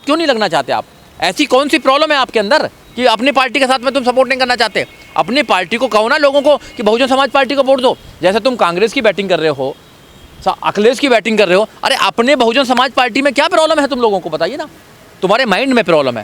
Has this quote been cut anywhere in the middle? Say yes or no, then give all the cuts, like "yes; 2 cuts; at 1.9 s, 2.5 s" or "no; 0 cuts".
no; 0 cuts